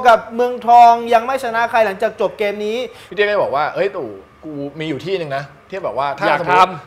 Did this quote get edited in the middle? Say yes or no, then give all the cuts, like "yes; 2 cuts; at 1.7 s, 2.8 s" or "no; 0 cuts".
yes; 1 cut; at 3.0 s